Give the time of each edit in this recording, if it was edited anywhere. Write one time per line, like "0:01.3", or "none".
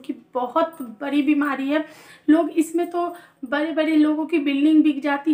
none